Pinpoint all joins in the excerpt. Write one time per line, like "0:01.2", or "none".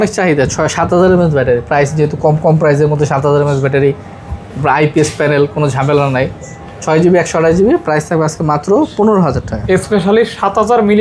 none